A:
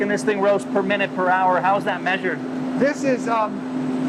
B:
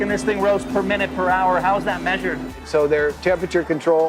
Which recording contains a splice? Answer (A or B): B